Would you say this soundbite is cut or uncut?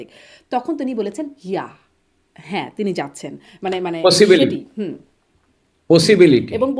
uncut